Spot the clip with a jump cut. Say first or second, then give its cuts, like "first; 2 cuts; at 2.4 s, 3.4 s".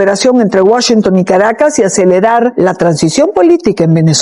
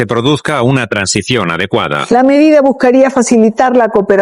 second; 1 cut; at 2.0 s